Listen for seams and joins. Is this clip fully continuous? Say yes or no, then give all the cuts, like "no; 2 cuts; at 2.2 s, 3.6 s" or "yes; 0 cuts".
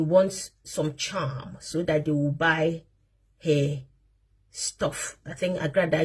yes; 0 cuts